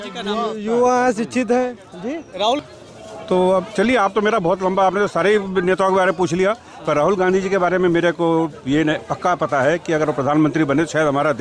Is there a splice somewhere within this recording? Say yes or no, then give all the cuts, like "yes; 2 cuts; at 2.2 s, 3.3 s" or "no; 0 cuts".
yes; 1 cut; at 2.6 s